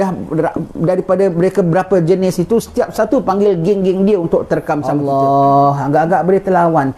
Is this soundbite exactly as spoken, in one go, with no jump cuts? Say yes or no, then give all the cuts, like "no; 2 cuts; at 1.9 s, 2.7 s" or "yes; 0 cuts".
no; 1 cut; at 4.9 s